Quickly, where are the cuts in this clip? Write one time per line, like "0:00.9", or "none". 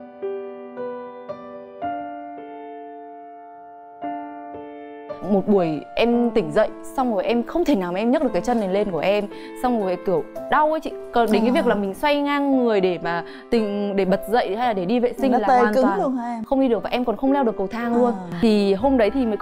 0:18.3